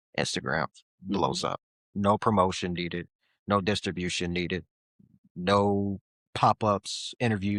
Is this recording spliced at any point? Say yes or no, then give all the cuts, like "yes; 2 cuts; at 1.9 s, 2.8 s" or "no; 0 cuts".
no; 0 cuts